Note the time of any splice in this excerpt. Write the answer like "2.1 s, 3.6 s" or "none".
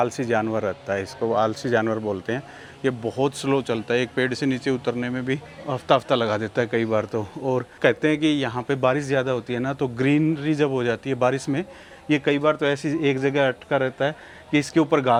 none